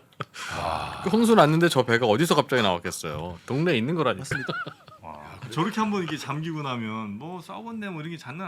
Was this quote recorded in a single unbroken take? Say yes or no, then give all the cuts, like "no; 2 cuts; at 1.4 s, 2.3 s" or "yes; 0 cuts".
no; 1 cut; at 5.4 s